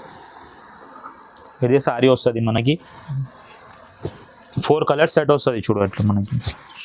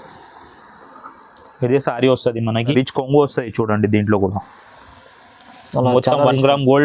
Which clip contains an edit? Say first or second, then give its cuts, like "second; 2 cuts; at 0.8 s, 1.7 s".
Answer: second; 1 cut; at 2.7 s